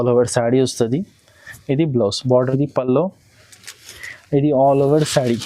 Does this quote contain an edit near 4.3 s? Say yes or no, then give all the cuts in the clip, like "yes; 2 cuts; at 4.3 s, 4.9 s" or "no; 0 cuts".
no; 1 cut; at 2.5 s